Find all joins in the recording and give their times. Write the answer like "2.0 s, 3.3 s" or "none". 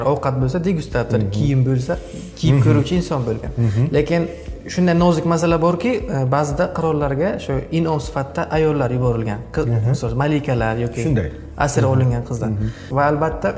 none